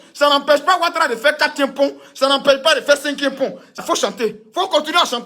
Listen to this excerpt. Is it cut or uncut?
cut